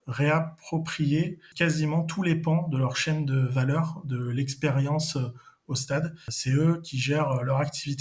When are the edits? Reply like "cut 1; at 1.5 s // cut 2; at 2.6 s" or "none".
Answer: cut 1; at 1.5 s // cut 2; at 6.3 s